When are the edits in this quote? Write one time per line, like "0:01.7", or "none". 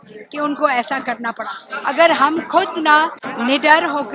0:01.6
0:03.2